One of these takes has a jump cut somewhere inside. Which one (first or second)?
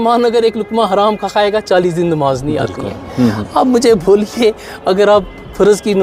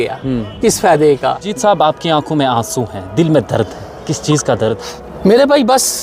second